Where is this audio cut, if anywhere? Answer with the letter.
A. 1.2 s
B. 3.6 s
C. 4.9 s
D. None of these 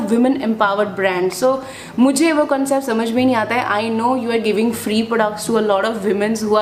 D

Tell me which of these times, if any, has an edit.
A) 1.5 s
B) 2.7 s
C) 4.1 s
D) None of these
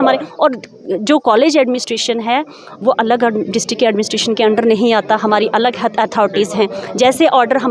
D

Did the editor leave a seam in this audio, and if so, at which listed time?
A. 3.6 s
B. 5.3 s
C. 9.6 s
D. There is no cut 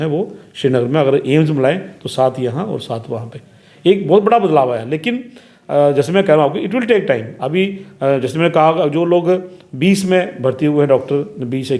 D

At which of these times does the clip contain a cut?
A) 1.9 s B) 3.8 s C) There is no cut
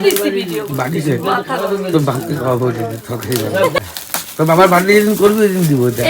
B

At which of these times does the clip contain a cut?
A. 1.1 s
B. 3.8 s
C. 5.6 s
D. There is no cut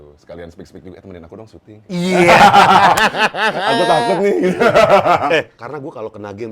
C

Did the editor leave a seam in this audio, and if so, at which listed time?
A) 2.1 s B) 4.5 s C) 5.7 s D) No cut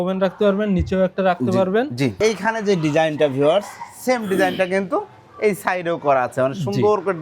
A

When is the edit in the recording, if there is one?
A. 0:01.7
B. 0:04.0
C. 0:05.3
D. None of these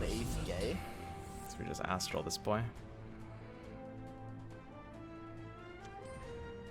D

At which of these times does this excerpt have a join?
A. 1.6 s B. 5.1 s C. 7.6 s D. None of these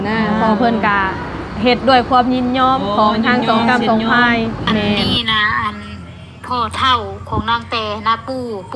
B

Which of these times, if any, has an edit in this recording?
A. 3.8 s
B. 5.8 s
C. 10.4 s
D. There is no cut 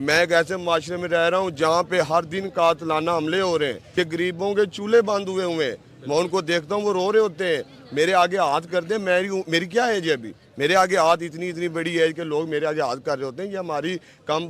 A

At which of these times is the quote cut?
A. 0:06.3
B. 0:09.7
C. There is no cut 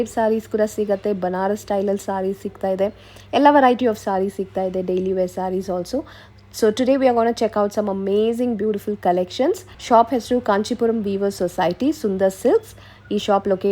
B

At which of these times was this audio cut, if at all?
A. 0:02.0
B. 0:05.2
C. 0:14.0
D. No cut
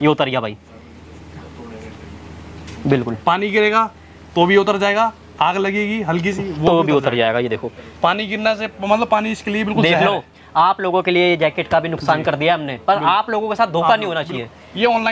D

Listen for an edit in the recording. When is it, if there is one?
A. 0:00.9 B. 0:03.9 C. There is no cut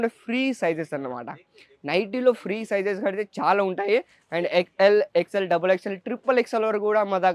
C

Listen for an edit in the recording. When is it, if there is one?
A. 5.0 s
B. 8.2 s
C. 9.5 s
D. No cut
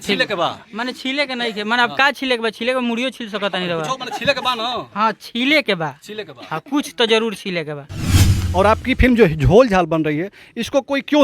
B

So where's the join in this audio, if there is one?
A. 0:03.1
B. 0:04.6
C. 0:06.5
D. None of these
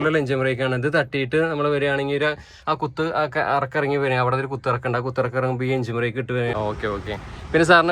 C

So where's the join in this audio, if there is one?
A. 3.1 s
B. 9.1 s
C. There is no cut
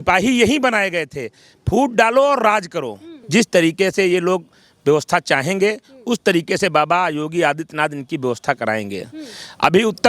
A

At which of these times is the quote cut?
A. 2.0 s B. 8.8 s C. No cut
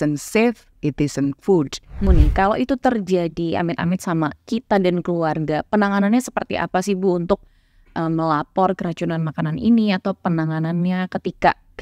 A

